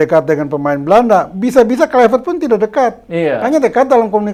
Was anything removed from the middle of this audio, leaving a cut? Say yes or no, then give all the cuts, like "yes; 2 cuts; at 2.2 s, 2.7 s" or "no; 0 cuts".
no; 0 cuts